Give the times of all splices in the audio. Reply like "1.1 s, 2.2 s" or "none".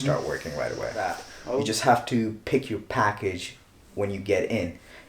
1.3 s